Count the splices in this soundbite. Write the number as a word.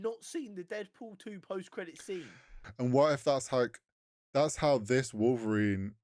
one